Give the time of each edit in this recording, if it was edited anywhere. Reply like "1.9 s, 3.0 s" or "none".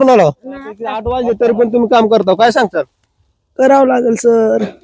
1.0 s